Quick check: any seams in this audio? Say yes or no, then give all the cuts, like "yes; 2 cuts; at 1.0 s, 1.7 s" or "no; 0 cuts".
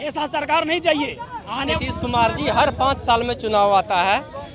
yes; 1 cut; at 1.7 s